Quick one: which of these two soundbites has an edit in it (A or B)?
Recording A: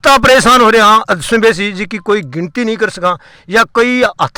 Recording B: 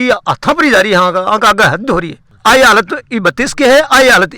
B